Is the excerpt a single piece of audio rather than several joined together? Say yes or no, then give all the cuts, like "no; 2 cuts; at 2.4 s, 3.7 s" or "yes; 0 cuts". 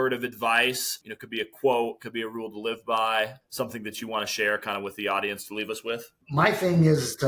no; 3 cuts; at 0.9 s, 3.4 s, 6.2 s